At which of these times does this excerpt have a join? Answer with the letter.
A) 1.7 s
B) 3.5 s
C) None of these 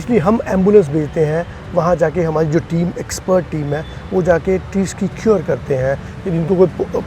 C